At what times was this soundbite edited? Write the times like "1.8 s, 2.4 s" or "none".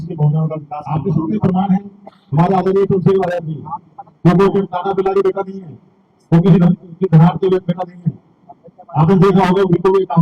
0.9 s